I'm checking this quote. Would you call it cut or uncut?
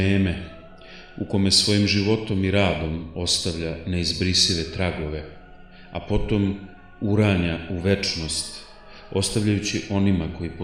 uncut